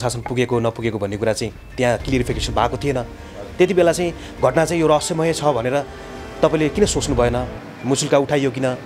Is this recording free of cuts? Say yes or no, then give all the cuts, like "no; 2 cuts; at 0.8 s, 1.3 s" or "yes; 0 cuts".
yes; 0 cuts